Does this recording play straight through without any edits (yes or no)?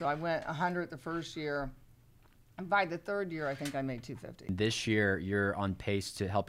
no